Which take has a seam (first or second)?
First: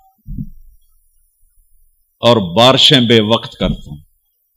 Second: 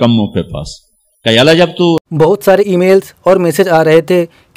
second